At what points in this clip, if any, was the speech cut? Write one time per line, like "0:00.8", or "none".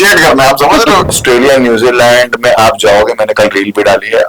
0:01.1

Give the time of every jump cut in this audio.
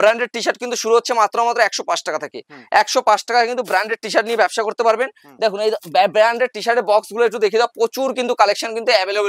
none

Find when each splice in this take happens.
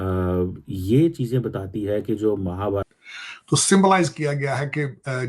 0:02.8

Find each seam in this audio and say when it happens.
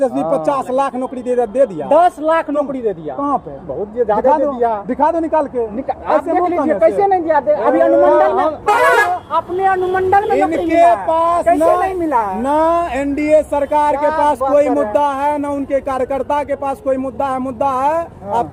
none

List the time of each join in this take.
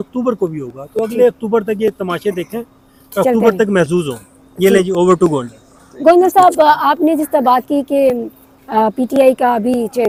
none

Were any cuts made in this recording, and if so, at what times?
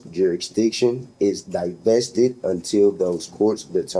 none

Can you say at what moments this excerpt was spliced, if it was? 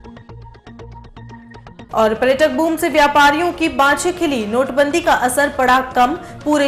none

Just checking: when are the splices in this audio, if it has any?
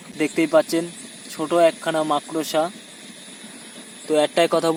none

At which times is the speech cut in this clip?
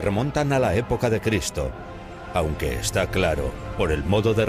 none

